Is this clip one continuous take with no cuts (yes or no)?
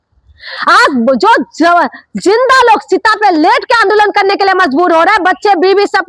yes